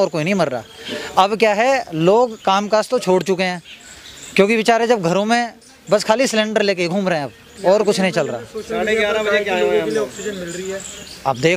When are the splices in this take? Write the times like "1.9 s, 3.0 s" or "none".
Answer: none

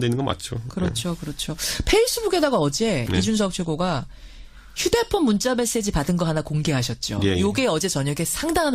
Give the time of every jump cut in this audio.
2.4 s

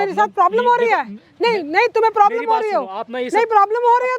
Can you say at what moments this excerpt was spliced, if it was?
none

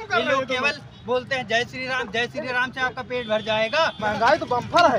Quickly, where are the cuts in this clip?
4.0 s

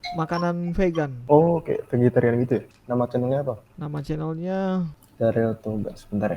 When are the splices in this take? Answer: 1.2 s, 2.7 s, 3.7 s, 5.0 s

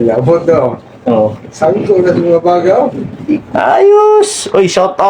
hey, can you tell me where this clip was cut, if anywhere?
3.5 s

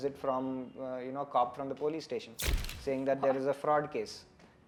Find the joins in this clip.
none

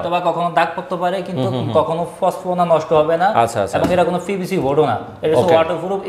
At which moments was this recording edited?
none

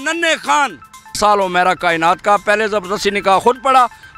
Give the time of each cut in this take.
1.2 s

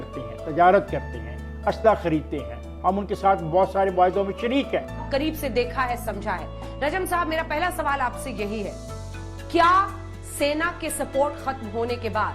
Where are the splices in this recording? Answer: 5.0 s

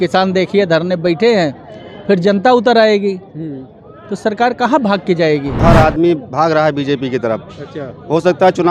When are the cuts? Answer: 5.6 s

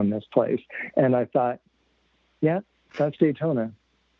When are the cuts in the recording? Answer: none

